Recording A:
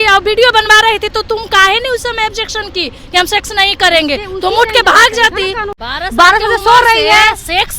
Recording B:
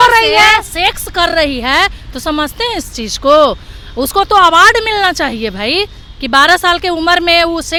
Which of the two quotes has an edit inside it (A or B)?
A